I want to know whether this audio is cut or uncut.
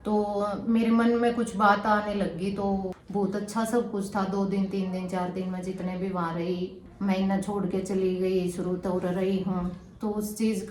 cut